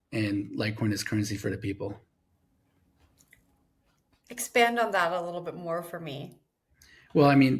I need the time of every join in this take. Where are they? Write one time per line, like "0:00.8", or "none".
none